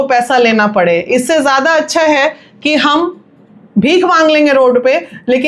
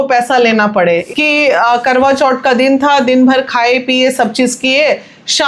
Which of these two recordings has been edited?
second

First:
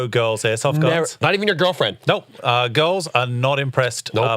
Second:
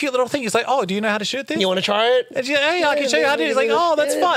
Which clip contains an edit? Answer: first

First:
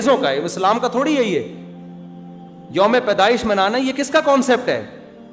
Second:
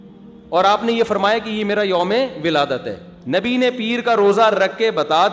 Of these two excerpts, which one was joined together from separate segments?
second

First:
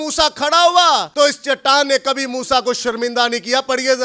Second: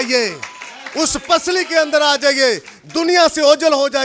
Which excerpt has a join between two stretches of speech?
first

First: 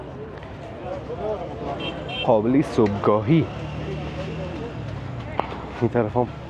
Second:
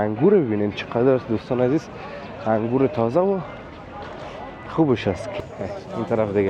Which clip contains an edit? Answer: second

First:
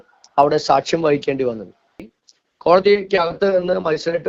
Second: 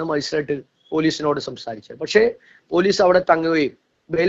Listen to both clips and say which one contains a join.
first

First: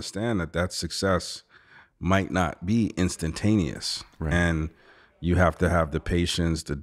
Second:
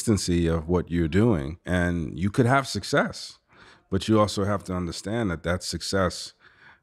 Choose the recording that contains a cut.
second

